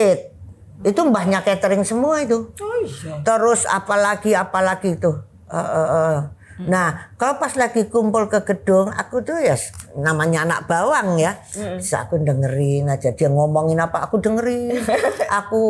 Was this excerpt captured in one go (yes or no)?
yes